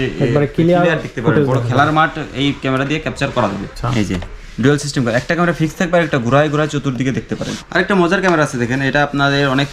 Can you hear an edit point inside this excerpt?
yes; 2 cuts; at 3.7 s, 7.5 s

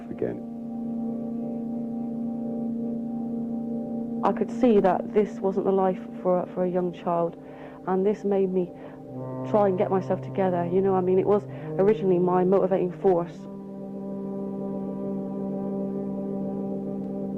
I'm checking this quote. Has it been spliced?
yes; 2 cuts; at 6.9 s, 7.2 s

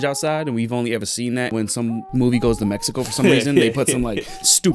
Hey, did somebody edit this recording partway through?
yes; 1 cut; at 1.5 s

